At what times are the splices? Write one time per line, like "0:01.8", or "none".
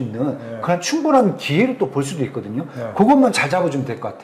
none